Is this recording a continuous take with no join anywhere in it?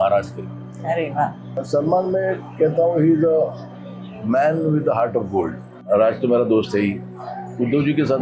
no; 2 cuts; at 1.6 s, 5.9 s

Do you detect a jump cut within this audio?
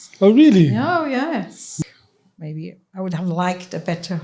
yes; 1 cut; at 1.7 s

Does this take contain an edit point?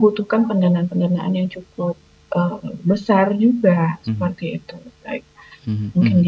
no; 0 cuts

